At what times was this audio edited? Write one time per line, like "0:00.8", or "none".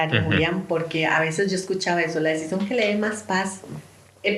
none